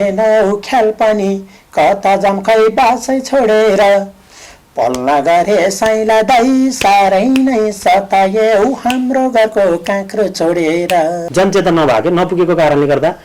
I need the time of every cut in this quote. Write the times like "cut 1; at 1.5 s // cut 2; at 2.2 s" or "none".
cut 1; at 11.2 s